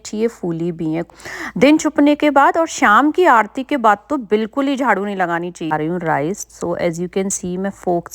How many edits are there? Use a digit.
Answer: 2